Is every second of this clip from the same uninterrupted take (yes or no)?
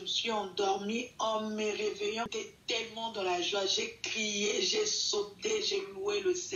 no